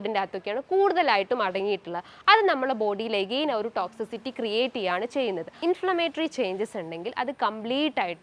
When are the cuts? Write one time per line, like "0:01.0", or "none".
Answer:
0:05.5